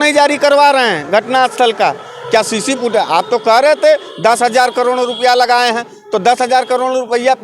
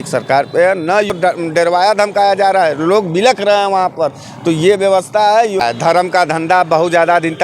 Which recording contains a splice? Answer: second; 2 cuts; at 1.1 s, 5.6 s

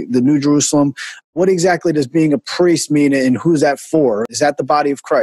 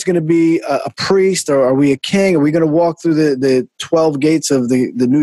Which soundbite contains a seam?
first; 2 cuts; at 1.3 s, 4.2 s

